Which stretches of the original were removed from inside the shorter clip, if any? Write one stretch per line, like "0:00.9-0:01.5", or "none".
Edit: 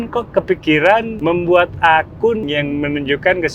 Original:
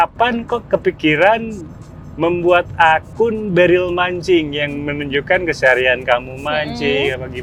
0:01.5-0:02.1
0:03.4-0:04.5